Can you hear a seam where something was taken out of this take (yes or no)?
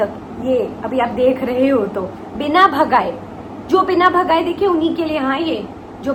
no